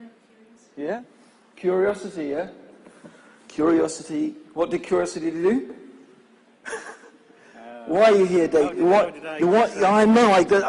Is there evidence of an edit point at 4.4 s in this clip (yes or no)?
no